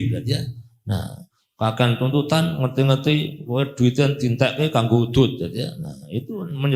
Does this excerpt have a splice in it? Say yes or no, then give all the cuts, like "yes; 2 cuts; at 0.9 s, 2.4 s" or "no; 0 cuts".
no; 0 cuts